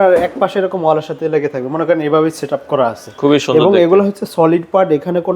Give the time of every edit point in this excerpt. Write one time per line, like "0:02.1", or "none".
none